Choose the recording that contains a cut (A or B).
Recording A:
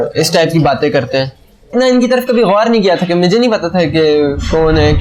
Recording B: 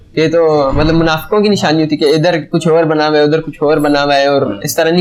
A